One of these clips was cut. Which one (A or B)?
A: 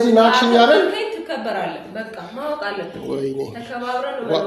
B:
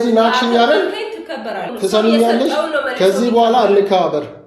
B